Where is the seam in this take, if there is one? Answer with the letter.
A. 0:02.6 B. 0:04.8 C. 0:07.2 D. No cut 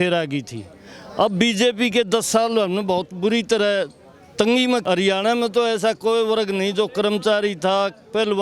B